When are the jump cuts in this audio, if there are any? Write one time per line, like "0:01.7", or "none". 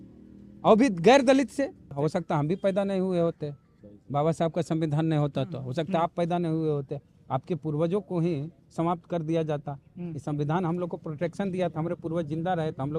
0:01.9